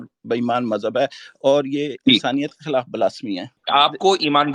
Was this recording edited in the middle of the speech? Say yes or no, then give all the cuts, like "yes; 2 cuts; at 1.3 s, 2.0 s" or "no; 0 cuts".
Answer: yes; 1 cut; at 3.6 s